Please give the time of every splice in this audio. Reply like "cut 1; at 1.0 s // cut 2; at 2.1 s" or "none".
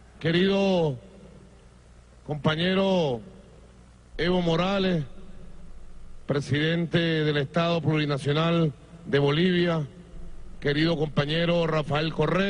cut 1; at 11.5 s